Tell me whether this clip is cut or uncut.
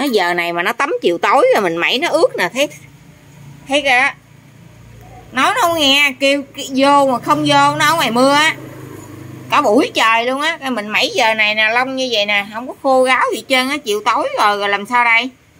uncut